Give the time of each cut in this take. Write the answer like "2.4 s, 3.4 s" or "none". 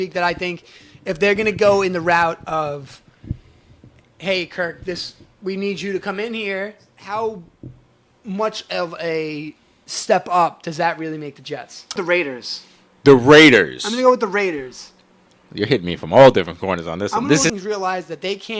6.9 s, 12.0 s, 17.5 s